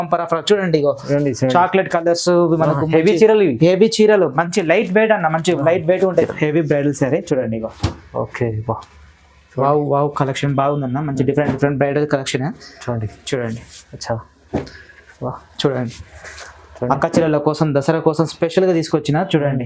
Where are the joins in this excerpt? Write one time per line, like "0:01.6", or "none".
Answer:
0:06.3